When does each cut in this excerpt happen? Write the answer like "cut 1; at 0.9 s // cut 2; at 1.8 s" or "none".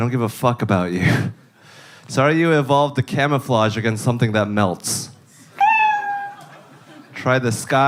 none